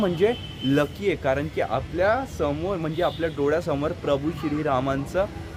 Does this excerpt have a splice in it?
no; 0 cuts

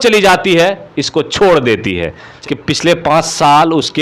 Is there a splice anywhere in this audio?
yes; 1 cut; at 2.3 s

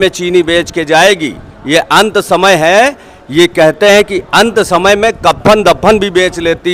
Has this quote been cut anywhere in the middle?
no; 0 cuts

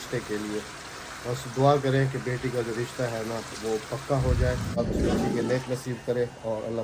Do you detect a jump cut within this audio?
yes; 1 cut; at 4.8 s

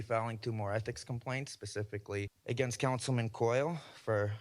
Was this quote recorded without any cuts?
no; 1 cut; at 2.4 s

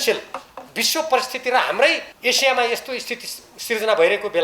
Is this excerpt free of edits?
no; 1 cut; at 2.1 s

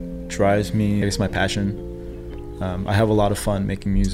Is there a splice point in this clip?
yes; 1 cut; at 1.0 s

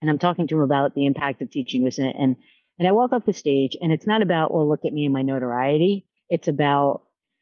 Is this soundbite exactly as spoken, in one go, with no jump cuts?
no; 1 cut; at 6.1 s

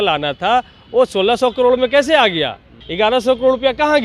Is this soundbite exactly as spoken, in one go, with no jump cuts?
no; 1 cut; at 2.8 s

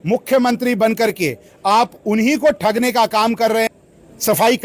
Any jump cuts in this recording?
yes; 1 cut; at 3.7 s

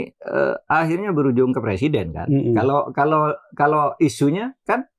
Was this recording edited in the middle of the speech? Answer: no; 0 cuts

